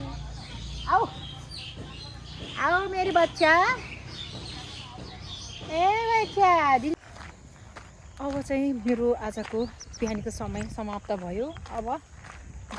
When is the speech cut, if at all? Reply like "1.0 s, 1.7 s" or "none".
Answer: 7.0 s